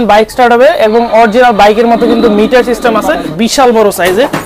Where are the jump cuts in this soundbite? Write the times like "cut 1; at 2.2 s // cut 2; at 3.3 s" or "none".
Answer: cut 1; at 3.3 s